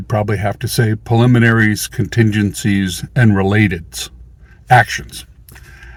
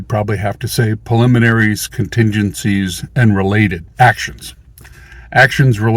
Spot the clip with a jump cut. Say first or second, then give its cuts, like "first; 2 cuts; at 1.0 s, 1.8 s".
second; 1 cut; at 3.8 s